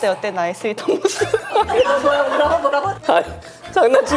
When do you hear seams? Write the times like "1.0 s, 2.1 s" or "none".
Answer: 2.9 s